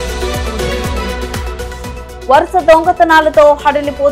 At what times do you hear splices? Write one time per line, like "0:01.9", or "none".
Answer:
0:01.2